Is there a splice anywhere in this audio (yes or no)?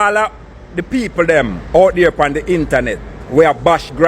no